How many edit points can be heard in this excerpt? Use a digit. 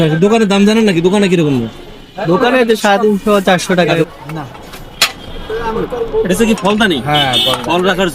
2